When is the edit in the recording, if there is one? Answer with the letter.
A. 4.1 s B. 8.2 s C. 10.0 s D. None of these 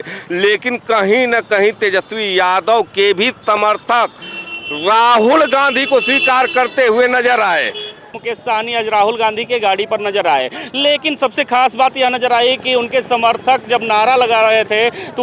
B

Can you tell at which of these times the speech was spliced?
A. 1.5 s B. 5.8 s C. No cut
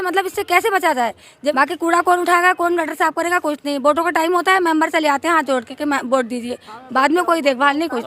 A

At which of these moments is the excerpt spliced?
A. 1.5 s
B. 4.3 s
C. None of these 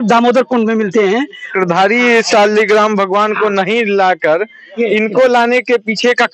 A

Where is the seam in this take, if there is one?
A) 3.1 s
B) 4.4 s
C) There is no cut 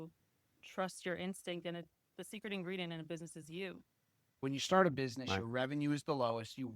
B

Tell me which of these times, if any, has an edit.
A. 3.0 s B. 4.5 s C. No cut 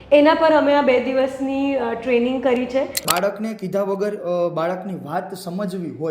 A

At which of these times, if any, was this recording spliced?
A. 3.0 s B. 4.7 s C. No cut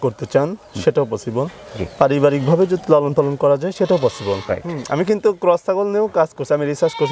B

